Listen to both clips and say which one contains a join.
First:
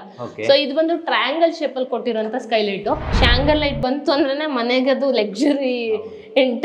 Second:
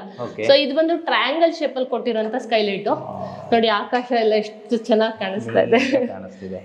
first; 1 cut; at 3.2 s

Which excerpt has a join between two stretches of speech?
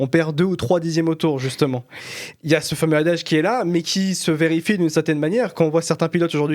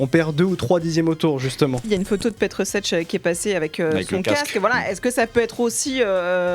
second; 1 cut; at 1.8 s

